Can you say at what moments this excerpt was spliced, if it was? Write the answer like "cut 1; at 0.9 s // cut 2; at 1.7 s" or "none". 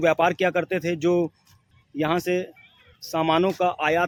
none